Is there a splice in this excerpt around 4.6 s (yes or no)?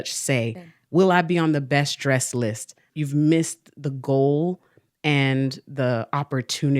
no